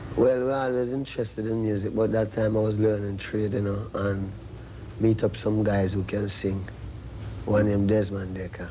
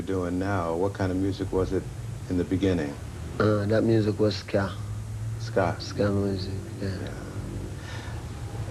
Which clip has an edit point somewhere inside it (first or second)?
first